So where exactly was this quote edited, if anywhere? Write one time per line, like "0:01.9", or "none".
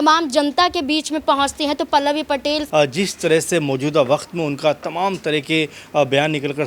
0:02.6